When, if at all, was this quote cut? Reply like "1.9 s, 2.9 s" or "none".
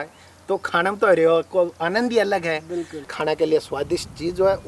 3.1 s

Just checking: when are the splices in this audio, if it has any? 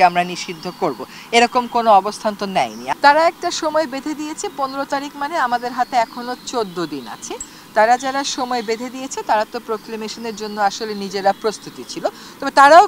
2.8 s

